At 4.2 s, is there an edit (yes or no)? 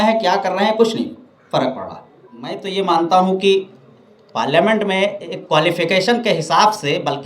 no